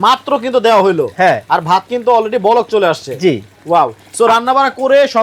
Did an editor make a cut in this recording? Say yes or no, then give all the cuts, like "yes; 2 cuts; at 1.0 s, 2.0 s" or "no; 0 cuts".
no; 0 cuts